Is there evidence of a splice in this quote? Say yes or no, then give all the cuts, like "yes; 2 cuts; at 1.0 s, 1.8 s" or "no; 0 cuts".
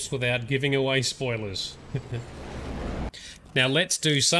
yes; 1 cut; at 3.1 s